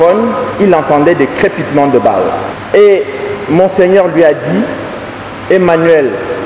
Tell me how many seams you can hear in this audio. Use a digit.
1